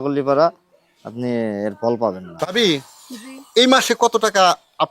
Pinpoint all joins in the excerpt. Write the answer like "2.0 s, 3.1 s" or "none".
2.5 s